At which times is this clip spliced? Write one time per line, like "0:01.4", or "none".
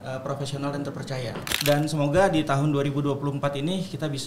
0:01.5